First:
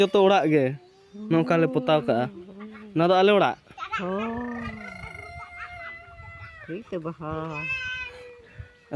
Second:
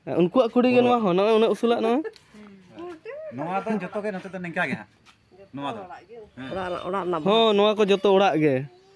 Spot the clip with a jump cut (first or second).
second